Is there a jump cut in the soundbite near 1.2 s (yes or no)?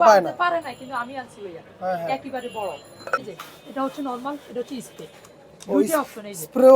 no